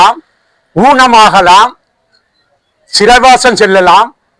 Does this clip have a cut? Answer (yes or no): no